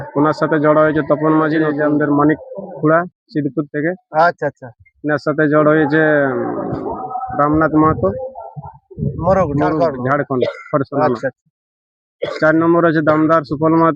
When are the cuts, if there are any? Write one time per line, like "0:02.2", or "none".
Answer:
0:01.7
0:09.7